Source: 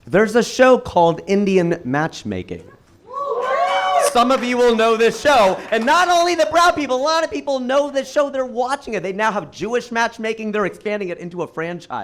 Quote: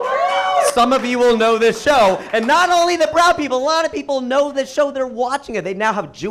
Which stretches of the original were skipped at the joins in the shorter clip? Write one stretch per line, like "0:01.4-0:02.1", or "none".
none